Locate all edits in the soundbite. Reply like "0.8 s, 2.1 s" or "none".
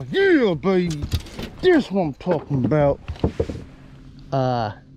3.1 s